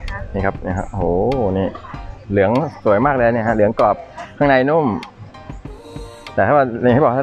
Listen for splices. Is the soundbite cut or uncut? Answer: uncut